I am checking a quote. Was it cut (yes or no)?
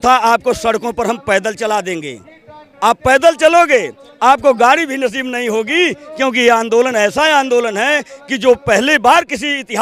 no